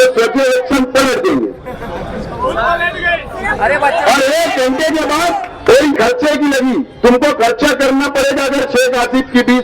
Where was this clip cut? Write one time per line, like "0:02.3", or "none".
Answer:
0:05.9